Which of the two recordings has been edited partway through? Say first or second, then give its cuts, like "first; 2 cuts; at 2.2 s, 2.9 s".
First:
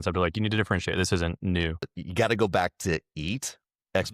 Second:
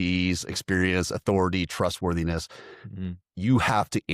first; 1 cut; at 2.0 s